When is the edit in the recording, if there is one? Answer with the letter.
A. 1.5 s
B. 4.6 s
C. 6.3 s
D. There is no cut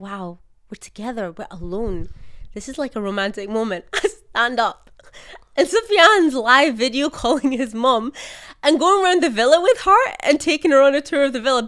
D